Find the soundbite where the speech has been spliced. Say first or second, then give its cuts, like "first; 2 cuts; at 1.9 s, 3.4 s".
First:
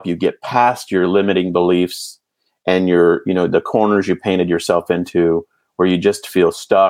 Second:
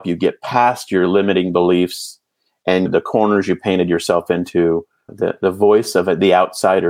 second; 2 cuts; at 2.9 s, 5.1 s